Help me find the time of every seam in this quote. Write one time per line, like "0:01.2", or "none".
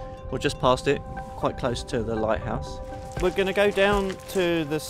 0:03.0